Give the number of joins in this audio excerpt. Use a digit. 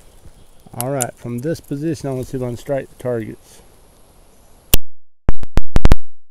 0